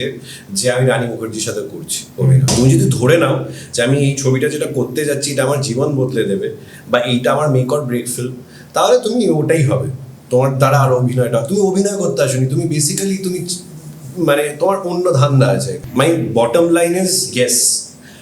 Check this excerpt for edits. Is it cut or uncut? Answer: cut